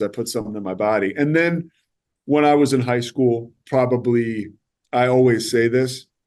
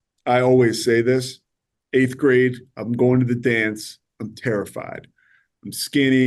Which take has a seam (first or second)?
first